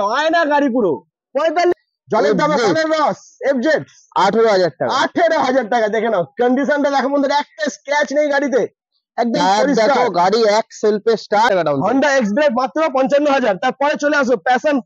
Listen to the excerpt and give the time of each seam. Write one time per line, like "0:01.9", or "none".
0:01.7
0:11.5